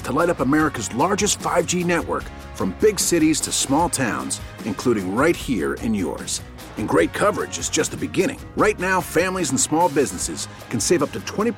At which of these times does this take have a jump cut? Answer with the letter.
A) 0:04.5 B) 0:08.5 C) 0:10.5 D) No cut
D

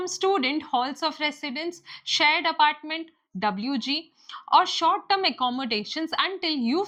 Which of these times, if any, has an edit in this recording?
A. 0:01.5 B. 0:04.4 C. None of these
C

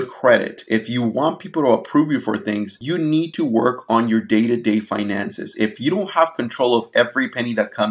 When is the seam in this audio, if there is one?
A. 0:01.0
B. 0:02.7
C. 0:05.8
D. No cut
B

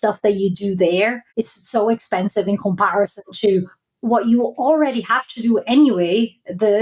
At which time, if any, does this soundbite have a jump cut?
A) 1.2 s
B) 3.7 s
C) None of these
A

